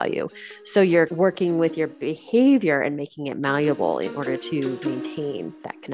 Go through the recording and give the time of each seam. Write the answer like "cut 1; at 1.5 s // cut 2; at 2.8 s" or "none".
cut 1; at 1.1 s // cut 2; at 4.8 s